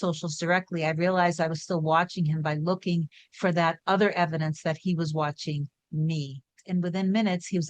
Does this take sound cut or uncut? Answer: cut